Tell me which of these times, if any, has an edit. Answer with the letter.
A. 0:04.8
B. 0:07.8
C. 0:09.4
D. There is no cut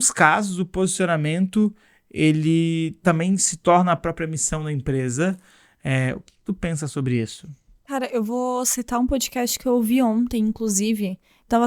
D